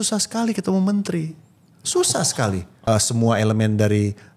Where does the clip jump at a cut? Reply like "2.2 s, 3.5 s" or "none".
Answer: 2.7 s